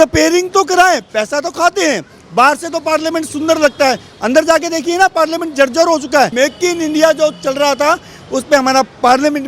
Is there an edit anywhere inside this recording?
yes; 1 cut; at 6.3 s

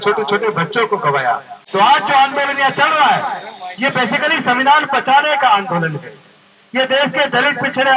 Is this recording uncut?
no; 1 cut; at 1.5 s

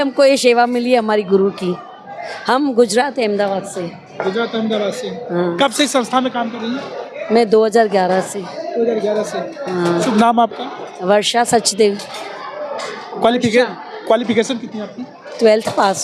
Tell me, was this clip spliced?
no; 0 cuts

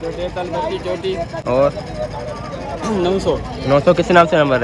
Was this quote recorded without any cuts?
yes; 0 cuts

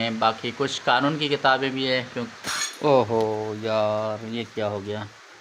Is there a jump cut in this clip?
yes; 1 cut; at 2.5 s

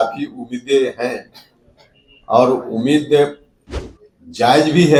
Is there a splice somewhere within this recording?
no; 0 cuts

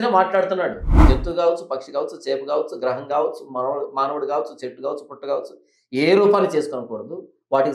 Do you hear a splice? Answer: yes; 1 cut; at 0.9 s

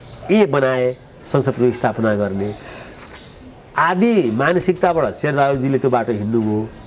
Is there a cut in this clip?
no; 0 cuts

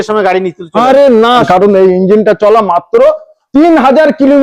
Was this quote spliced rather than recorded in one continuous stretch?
yes; 1 cut; at 1.4 s

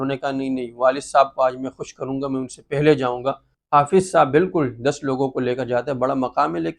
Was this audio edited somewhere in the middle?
yes; 1 cut; at 3.5 s

